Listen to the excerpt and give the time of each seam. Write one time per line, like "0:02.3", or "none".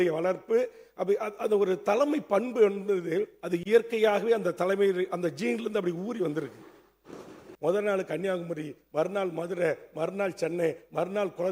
0:07.5